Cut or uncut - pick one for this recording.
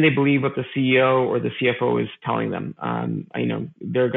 uncut